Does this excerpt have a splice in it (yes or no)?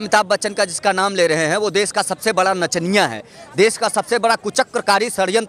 no